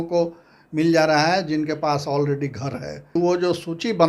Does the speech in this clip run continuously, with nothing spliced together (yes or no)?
no